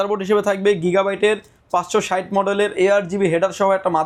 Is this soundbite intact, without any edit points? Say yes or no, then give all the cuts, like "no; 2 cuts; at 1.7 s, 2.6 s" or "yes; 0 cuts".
yes; 0 cuts